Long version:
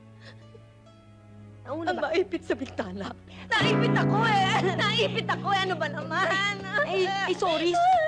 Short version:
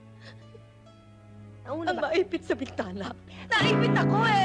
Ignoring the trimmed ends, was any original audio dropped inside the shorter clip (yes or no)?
no